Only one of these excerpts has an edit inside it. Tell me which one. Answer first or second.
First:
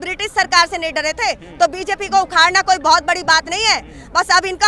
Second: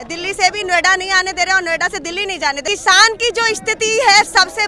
second